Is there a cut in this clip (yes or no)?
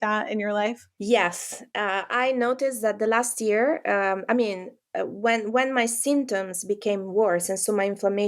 no